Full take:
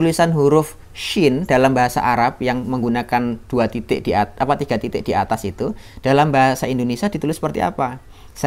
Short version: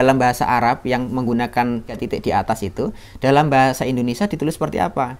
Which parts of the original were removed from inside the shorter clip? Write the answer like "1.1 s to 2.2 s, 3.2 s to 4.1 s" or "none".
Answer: 3.5 s to 4.7 s